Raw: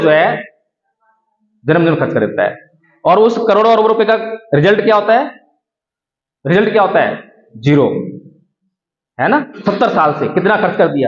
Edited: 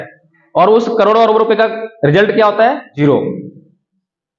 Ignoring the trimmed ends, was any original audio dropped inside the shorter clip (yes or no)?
yes